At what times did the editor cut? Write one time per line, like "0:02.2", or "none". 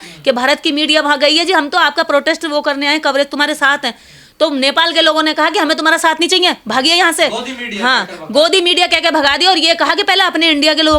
none